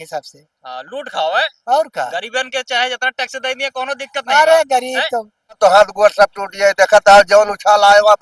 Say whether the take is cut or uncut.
cut